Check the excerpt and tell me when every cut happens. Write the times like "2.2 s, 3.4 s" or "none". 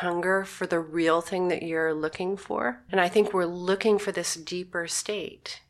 2.8 s